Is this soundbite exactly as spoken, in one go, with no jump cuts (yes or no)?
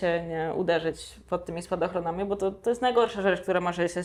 yes